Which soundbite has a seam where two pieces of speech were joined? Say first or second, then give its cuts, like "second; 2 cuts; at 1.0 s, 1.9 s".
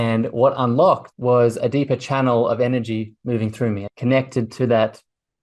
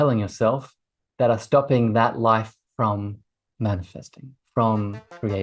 first; 2 cuts; at 1.1 s, 3.8 s